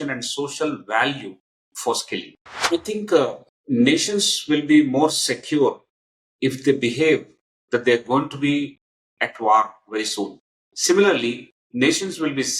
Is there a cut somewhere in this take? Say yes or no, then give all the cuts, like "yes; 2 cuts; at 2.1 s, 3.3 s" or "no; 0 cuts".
yes; 2 cuts; at 2.5 s, 3.5 s